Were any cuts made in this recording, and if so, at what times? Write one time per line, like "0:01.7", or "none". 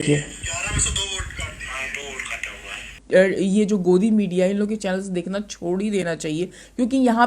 0:03.0